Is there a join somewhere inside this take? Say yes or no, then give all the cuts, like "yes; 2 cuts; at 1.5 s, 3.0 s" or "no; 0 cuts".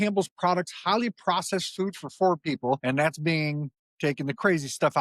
yes; 1 cut; at 2.8 s